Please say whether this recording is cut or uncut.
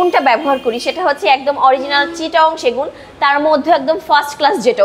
uncut